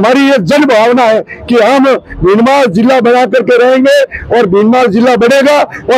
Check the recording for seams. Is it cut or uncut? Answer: uncut